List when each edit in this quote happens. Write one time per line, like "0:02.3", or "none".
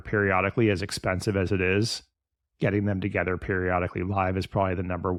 none